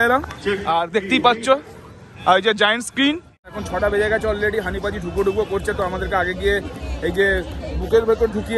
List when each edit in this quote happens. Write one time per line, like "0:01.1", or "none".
0:03.5